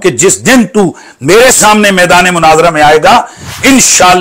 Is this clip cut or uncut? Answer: uncut